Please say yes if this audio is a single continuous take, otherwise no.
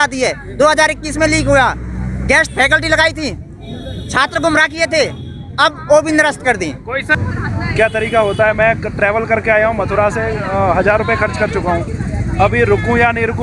no